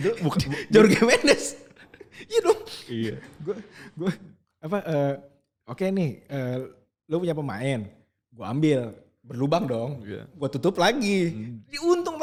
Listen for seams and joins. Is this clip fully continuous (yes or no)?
yes